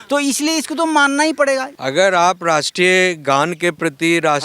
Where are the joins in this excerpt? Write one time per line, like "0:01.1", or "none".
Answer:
0:01.7